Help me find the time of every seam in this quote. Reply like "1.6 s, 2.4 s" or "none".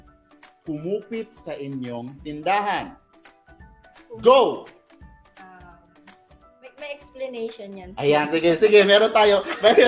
none

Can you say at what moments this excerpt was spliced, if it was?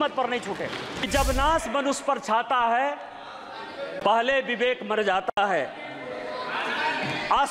1.1 s

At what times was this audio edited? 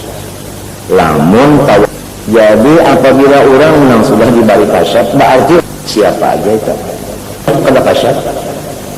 1.9 s, 5.6 s, 7.5 s

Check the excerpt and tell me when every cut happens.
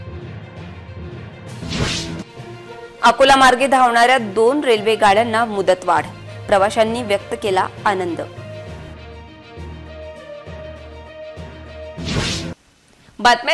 none

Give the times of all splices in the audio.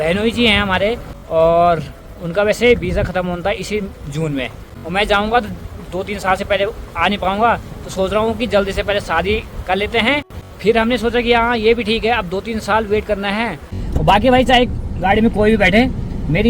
1.1 s, 4.7 s, 10.4 s, 13.7 s

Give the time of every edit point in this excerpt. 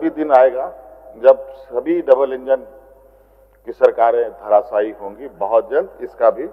none

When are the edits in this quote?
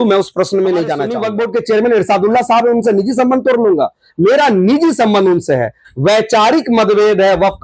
1.2 s

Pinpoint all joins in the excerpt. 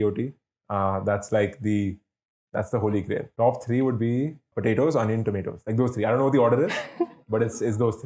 3.3 s, 4.5 s

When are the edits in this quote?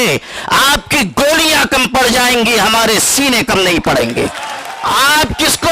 4.7 s

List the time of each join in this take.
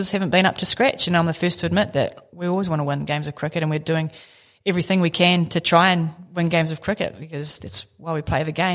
none

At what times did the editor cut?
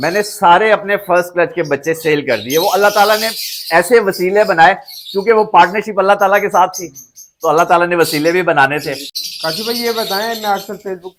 none

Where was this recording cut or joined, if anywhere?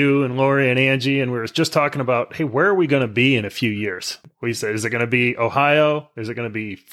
4.2 s

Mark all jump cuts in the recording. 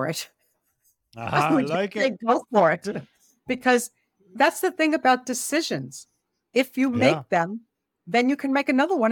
none

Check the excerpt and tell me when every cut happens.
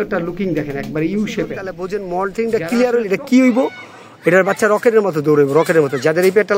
1.8 s

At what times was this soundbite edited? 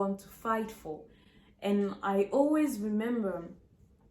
none

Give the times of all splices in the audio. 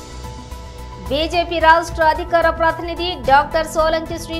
1.1 s

